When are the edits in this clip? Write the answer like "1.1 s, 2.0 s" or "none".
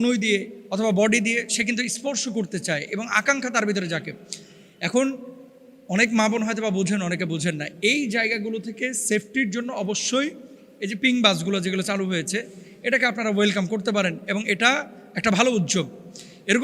none